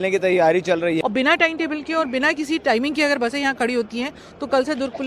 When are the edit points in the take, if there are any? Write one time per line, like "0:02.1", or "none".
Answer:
0:01.0